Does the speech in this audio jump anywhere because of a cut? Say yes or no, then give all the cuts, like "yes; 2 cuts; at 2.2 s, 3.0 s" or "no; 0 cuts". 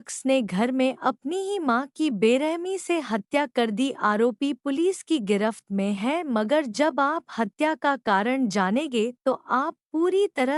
no; 0 cuts